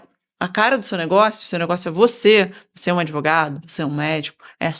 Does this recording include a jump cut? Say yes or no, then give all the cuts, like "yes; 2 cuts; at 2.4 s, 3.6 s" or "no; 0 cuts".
no; 0 cuts